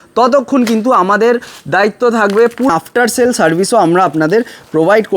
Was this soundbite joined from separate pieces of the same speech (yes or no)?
yes